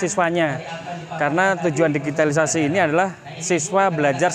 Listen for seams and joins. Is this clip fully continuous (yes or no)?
yes